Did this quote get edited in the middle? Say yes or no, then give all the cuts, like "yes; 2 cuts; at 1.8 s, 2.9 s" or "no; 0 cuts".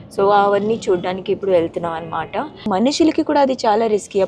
yes; 1 cut; at 2.7 s